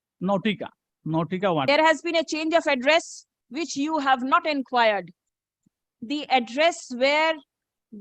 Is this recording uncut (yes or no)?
no